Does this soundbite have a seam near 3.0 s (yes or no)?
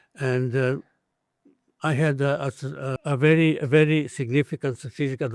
yes